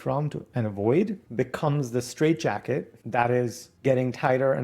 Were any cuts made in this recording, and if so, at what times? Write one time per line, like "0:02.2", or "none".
0:01.2
0:03.0
0:03.7